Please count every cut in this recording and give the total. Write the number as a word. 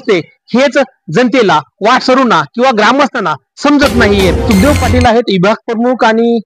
one